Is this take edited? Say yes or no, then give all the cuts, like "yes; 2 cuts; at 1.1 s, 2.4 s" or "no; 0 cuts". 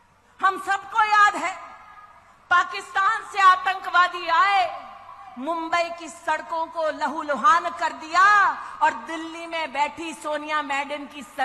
no; 0 cuts